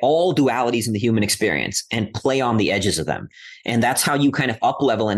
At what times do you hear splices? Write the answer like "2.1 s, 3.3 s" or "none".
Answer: none